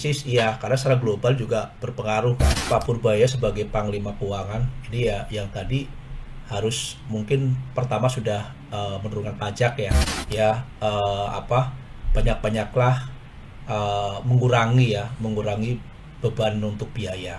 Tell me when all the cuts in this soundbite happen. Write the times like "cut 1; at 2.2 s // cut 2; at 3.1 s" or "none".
cut 1; at 2.5 s // cut 2; at 10.1 s